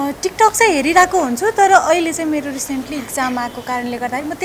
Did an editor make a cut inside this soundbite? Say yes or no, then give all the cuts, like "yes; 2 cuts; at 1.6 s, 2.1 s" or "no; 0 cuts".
no; 0 cuts